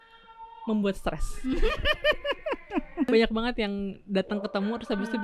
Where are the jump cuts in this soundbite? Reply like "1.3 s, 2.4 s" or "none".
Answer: 3.1 s